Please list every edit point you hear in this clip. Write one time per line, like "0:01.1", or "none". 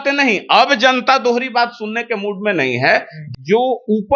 0:03.2